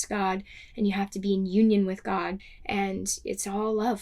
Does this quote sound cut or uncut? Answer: cut